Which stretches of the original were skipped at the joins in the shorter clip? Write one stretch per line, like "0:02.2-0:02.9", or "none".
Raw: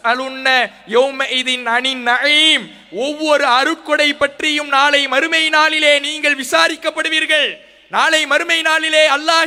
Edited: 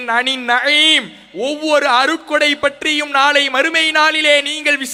none